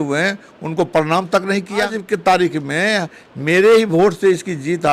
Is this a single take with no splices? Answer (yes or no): no